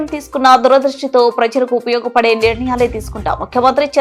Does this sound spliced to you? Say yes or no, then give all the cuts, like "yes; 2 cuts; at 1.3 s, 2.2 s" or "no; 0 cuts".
no; 0 cuts